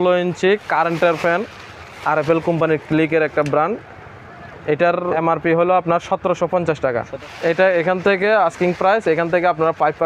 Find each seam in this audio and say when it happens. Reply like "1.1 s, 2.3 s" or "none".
5.2 s, 7.1 s